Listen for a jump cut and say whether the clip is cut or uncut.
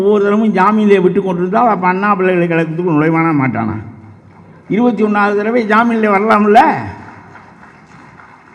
uncut